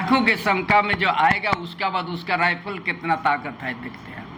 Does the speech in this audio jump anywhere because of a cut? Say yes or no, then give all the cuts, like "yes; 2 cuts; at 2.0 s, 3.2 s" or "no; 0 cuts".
no; 0 cuts